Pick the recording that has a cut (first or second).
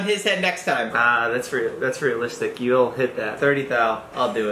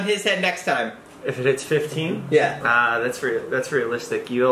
first